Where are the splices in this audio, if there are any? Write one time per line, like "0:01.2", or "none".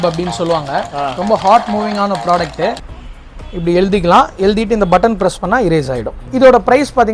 0:02.9
0:06.2